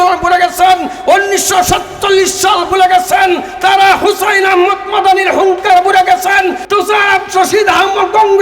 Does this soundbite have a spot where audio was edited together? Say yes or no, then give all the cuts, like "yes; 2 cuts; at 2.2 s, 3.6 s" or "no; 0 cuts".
yes; 1 cut; at 6.6 s